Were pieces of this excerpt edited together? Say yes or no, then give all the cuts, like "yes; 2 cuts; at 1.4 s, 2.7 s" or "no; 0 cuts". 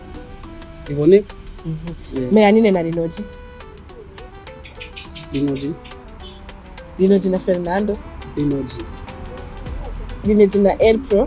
no; 0 cuts